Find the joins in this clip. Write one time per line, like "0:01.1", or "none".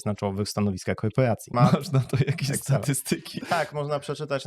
0:01.5
0:03.4